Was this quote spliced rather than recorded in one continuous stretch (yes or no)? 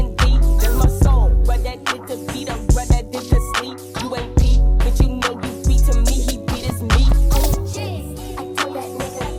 no